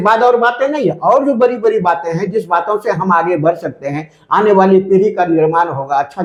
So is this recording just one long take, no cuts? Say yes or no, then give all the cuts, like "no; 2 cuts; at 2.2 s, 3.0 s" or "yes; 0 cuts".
yes; 0 cuts